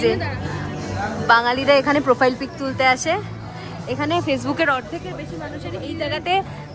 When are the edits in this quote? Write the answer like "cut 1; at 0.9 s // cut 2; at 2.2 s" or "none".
none